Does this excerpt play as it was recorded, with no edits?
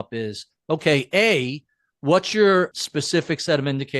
no; 1 cut; at 2.7 s

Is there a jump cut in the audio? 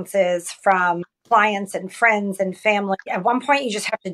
yes; 2 cuts; at 1.1 s, 3.1 s

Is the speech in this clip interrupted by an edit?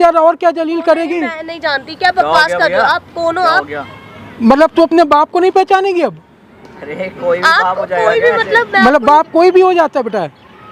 no; 0 cuts

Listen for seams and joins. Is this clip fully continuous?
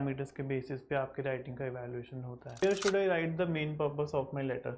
no; 1 cut; at 2.6 s

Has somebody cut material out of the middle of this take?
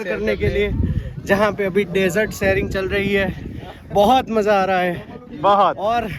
no; 0 cuts

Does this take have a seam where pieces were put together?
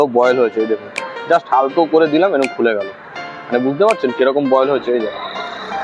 no; 0 cuts

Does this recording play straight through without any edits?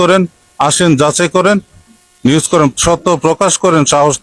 yes; 0 cuts

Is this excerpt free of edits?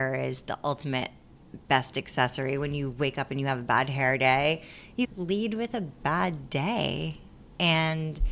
yes; 0 cuts

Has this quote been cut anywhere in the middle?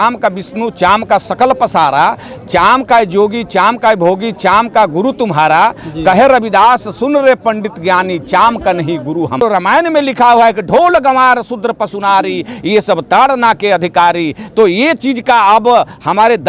yes; 1 cut; at 9.4 s

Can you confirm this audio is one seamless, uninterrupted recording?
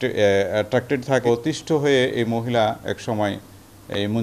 no; 1 cut; at 1.3 s

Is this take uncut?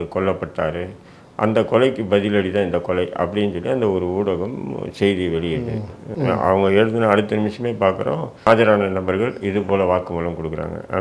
no; 2 cuts; at 6.0 s, 8.5 s

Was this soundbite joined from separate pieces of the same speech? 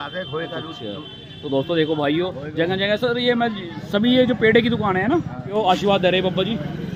yes; 1 cut; at 5.4 s

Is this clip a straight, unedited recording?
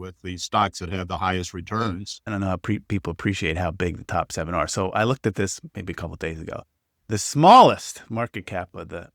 no; 1 cut; at 2.2 s

